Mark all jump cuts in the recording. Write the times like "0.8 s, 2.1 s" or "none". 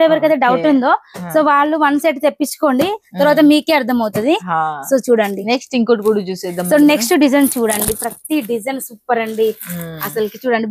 none